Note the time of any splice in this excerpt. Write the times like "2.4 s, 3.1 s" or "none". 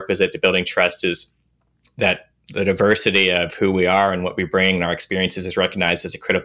none